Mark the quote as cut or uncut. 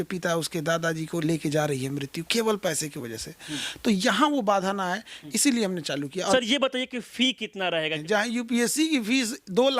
cut